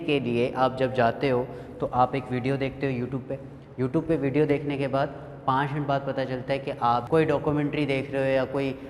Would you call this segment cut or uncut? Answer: cut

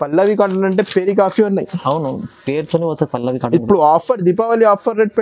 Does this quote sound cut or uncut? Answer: uncut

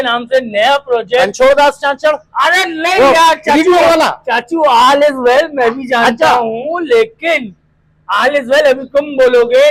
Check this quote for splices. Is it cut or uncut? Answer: uncut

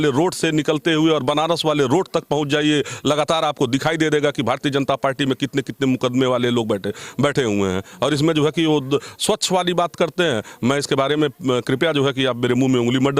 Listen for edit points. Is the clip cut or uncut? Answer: uncut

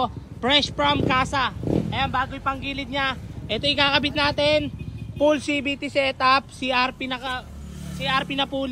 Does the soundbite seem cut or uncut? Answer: uncut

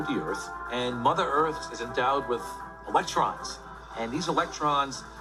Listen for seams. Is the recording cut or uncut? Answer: uncut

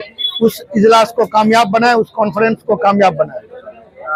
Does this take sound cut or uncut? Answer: uncut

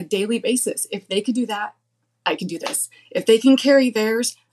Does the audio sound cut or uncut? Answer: uncut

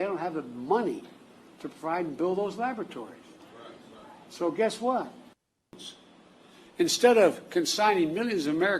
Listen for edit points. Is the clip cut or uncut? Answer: cut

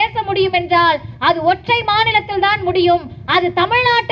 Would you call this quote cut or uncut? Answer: uncut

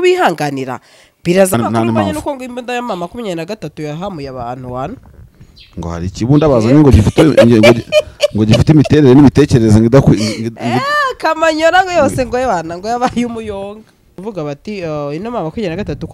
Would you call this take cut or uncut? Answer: cut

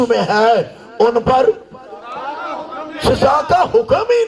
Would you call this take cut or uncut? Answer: uncut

